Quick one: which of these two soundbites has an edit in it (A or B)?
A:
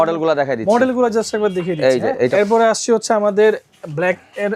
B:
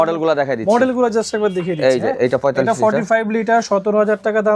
A